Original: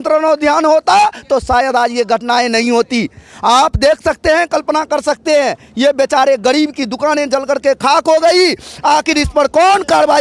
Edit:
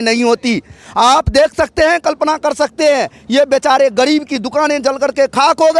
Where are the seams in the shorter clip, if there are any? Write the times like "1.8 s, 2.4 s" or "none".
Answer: none